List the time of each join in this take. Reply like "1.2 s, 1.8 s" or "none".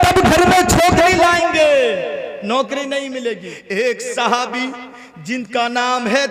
3.5 s